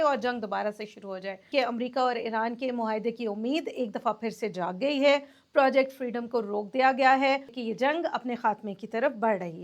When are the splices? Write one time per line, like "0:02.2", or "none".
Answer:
0:01.5
0:07.6